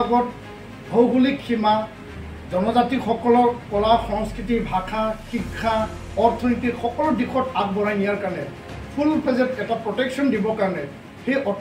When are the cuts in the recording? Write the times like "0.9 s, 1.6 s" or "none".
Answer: none